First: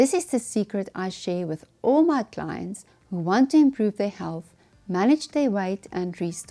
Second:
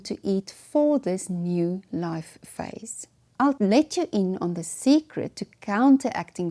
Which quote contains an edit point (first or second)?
second